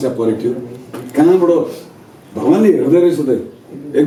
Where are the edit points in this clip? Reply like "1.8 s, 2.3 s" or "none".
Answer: none